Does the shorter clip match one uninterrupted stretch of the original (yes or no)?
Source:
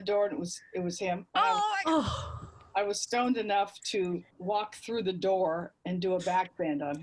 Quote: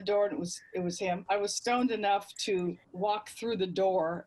no